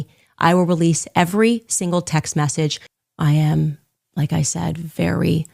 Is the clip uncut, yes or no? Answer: no